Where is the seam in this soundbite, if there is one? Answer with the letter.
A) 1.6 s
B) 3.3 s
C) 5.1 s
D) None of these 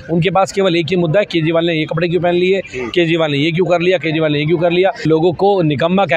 C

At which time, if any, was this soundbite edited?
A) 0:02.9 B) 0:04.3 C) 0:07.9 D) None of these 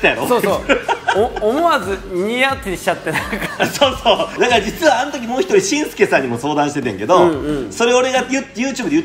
B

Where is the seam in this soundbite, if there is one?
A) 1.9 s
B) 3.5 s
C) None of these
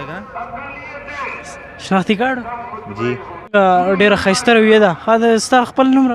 B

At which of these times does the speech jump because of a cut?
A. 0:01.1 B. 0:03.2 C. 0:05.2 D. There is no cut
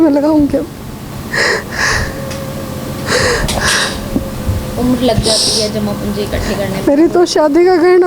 A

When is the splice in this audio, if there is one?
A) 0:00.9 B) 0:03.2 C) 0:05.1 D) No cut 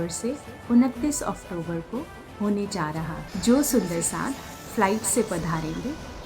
B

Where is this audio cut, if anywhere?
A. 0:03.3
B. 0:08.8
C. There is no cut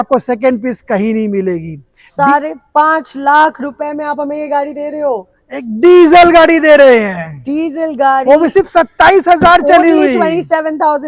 C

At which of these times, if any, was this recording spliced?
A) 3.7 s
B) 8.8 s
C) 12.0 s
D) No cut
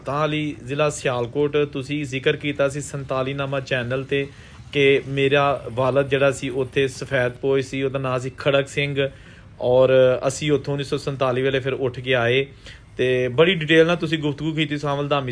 D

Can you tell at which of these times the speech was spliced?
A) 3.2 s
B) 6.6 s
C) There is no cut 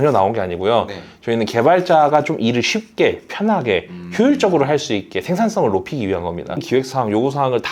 B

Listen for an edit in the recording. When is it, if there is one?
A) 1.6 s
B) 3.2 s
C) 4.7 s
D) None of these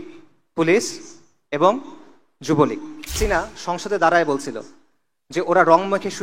B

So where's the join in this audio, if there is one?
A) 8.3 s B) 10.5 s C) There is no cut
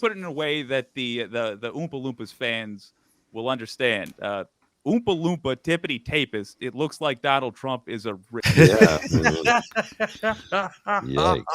A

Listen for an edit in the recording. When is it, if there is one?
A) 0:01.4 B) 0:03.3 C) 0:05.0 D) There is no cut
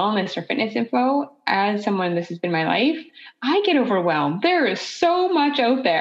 D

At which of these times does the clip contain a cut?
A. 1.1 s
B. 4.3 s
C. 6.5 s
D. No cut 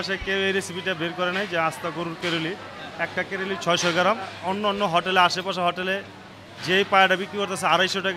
B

